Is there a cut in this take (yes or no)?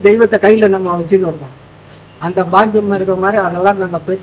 no